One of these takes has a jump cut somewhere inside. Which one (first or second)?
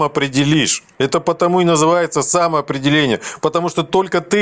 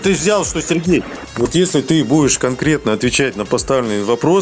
second